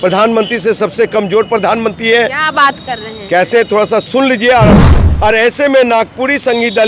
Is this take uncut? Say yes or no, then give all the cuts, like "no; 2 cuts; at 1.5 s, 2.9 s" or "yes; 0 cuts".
no; 1 cut; at 4.8 s